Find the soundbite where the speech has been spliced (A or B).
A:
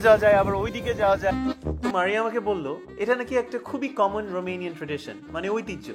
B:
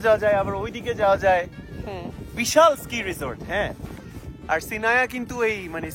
A